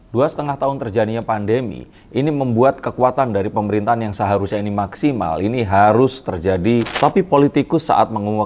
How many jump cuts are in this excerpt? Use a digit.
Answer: 1